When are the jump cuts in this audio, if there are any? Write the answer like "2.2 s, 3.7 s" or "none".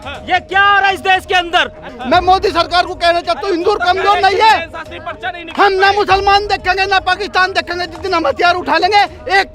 1.9 s